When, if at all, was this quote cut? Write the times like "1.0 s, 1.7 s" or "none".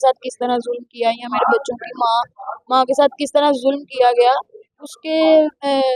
none

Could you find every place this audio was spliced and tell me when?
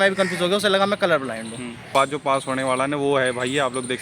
1.9 s

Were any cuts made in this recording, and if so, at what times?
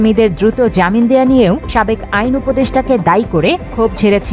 none

